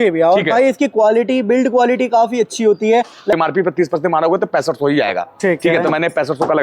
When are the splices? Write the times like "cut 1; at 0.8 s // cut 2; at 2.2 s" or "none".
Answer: cut 1; at 3.3 s

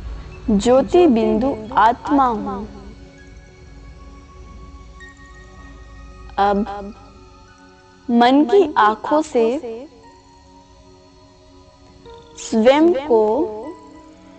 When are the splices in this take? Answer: none

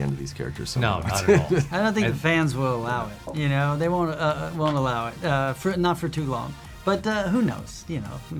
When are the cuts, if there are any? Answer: cut 1; at 3.3 s

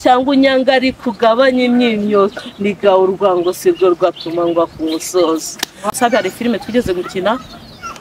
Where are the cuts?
cut 1; at 5.9 s

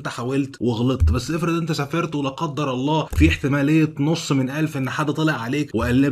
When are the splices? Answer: none

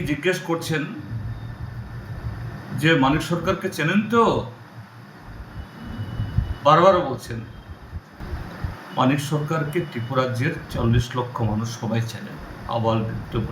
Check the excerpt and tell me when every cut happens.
cut 1; at 8.2 s

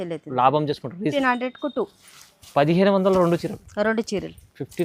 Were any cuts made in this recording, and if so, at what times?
cut 1; at 1.1 s

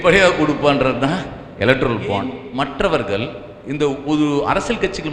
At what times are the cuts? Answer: cut 1; at 2.4 s

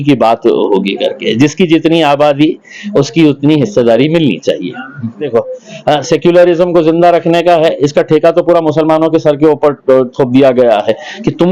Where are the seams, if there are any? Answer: cut 1; at 5.3 s

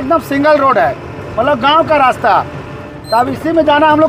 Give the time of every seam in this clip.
none

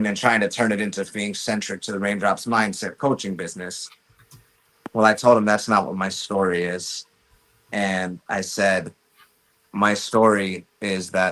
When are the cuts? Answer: none

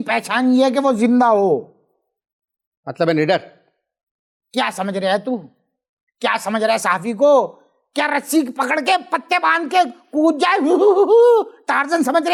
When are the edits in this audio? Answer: none

